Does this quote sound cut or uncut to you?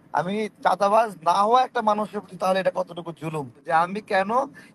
cut